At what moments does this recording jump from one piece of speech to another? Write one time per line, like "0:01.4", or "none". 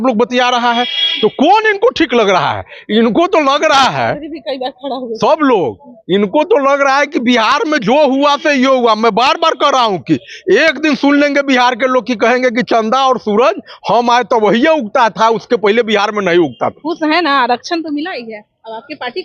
none